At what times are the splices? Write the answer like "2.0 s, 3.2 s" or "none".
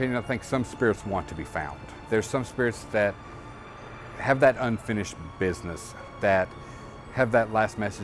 2.0 s, 6.0 s